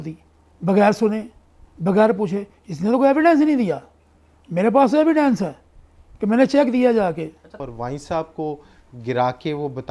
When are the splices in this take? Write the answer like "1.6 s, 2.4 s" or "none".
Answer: 7.6 s